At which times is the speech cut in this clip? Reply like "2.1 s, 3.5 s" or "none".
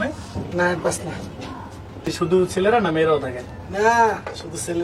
2.1 s